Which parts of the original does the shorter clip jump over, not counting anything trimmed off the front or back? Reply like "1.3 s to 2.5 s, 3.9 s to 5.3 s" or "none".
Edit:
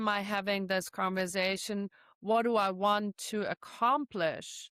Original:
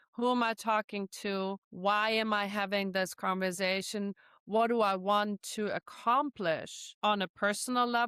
none